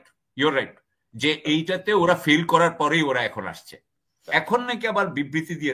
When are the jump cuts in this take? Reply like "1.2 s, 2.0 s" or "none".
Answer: 4.3 s